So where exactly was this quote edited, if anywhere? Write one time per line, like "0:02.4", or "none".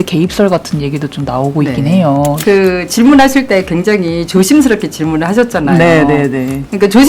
0:02.4